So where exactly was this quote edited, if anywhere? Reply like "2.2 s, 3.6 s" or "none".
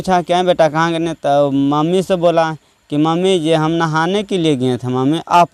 none